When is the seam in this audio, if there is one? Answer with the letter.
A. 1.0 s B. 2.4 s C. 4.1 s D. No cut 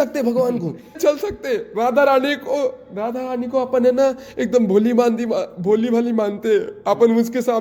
A